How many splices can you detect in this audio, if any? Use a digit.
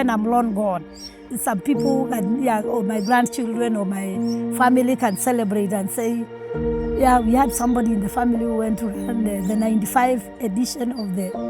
1